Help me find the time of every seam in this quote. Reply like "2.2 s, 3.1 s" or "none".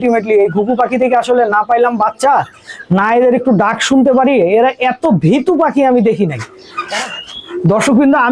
6.8 s